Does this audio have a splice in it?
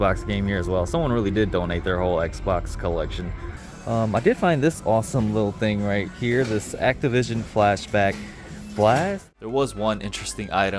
yes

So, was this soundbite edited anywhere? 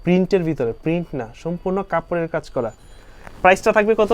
no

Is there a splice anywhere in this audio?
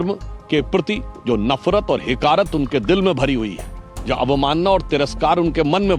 no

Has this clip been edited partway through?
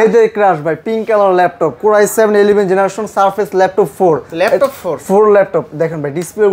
no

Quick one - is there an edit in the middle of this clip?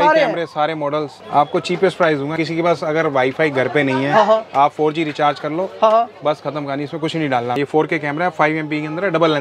yes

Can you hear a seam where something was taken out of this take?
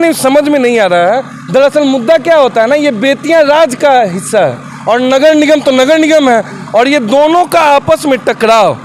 no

